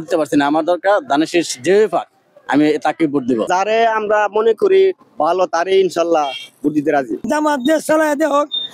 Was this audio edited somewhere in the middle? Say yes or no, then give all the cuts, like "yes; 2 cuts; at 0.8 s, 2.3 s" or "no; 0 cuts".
yes; 2 cuts; at 3.5 s, 7.2 s